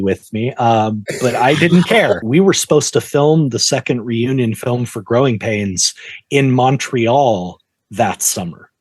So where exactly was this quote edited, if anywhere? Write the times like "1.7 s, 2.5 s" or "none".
2.2 s